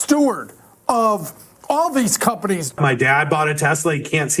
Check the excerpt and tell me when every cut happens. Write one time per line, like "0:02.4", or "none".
0:02.7